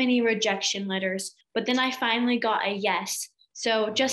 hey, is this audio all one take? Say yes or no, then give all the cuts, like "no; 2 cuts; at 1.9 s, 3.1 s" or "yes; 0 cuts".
no; 1 cut; at 1.3 s